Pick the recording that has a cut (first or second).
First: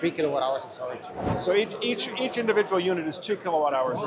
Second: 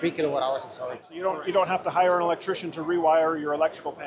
second